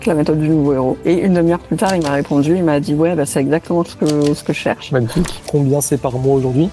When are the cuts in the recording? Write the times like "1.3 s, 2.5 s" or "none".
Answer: 1.0 s, 5.3 s